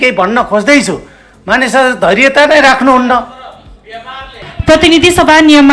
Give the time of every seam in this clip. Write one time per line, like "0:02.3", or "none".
0:04.4